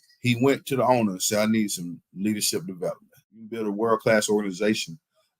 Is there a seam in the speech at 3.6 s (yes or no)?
yes